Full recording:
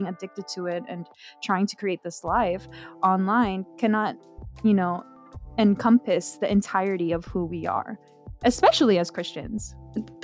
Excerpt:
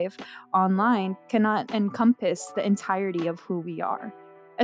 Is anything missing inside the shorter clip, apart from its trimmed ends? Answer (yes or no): yes